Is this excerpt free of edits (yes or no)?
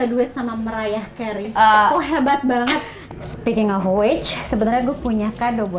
no